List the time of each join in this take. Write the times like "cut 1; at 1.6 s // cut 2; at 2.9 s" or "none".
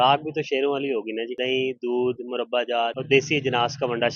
cut 1; at 1.3 s // cut 2; at 3.0 s